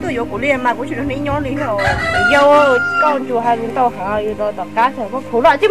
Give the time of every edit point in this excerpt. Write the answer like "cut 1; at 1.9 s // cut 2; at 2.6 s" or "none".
none

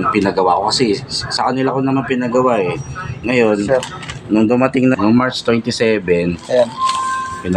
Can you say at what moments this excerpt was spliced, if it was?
cut 1; at 4.9 s

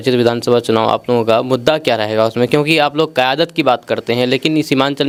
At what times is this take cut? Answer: none

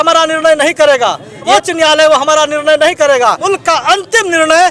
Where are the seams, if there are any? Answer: cut 1; at 1.4 s // cut 2; at 3.4 s

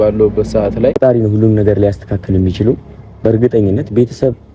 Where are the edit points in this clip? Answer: cut 1; at 1.0 s

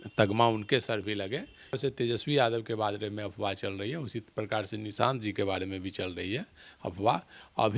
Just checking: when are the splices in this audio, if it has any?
cut 1; at 1.8 s

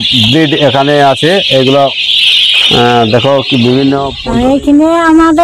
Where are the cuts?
cut 1; at 4.2 s

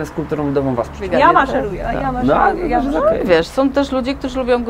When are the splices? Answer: cut 1; at 1.0 s

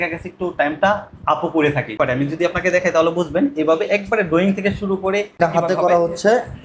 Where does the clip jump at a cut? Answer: cut 1; at 2.0 s // cut 2; at 5.4 s

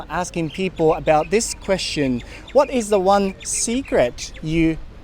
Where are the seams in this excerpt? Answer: none

